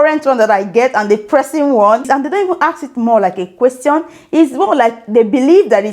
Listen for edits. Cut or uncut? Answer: cut